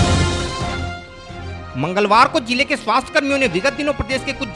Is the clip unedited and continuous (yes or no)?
yes